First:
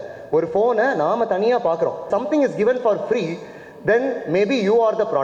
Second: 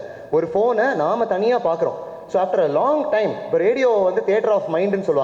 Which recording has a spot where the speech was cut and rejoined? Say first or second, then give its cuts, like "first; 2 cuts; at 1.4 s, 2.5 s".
first; 1 cut; at 2.0 s